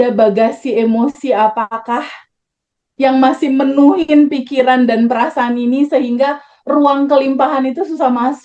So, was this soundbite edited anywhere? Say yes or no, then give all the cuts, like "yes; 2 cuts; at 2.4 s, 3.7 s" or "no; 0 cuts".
no; 0 cuts